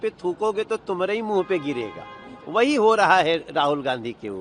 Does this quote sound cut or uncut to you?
uncut